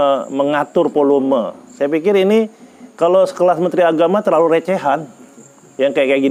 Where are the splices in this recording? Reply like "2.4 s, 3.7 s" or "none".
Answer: none